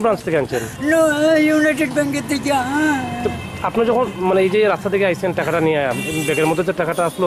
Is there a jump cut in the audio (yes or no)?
no